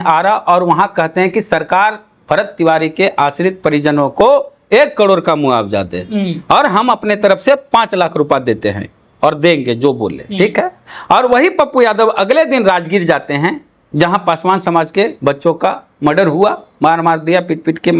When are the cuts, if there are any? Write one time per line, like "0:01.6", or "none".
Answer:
none